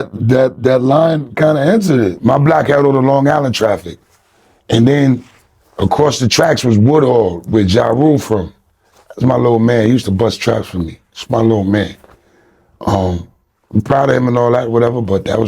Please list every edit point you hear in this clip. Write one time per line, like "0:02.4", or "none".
0:02.2